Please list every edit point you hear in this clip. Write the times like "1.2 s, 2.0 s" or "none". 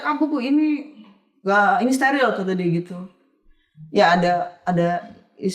none

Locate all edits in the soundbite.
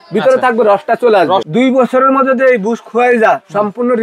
1.5 s

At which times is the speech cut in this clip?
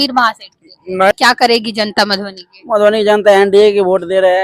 1.1 s

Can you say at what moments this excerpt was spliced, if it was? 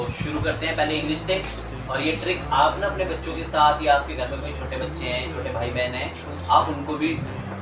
none

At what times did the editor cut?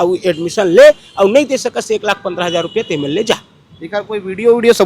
none

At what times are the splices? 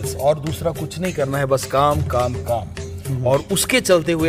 none

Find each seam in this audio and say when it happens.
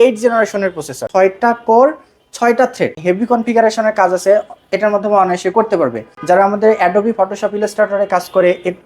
1.0 s, 3.0 s, 6.1 s

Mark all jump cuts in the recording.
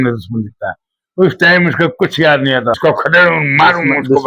2.8 s

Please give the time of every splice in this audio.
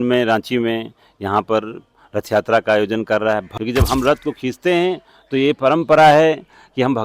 3.5 s

